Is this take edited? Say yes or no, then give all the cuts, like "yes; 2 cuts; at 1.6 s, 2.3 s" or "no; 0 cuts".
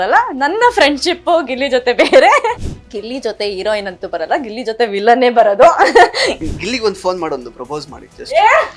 yes; 2 cuts; at 2.6 s, 6.5 s